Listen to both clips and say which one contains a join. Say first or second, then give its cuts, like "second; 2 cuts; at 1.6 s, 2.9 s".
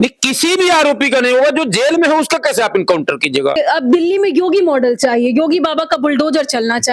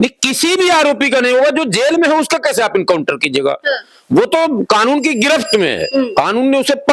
first; 1 cut; at 3.6 s